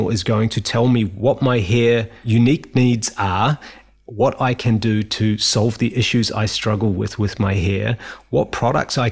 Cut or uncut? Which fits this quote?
cut